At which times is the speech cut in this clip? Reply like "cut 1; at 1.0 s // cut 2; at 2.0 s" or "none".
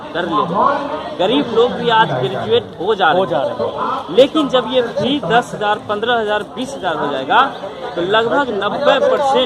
none